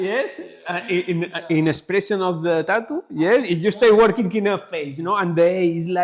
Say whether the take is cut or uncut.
uncut